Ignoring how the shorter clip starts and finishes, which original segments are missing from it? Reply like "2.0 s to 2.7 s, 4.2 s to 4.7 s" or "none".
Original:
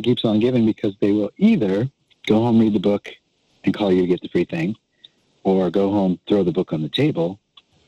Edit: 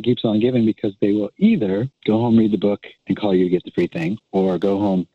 1.9 s to 2.1 s, 3.1 s to 3.5 s, 4.8 s to 5.3 s